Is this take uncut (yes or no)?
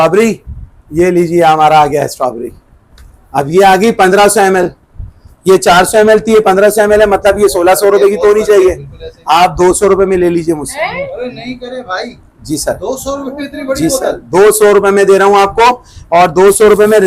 yes